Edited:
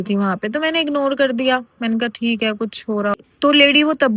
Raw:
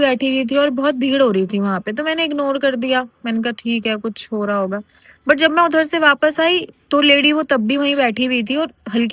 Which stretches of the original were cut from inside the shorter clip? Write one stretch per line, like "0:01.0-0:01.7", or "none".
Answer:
0:04.6-0:06.7